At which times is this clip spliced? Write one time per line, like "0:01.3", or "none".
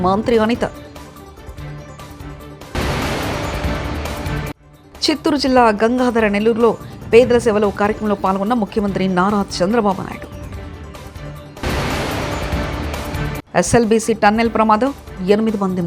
none